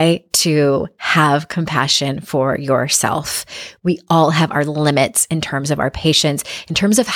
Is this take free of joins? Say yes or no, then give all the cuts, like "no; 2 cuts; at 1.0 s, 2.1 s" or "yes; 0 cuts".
yes; 0 cuts